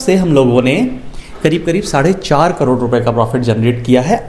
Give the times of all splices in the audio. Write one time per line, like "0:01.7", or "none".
none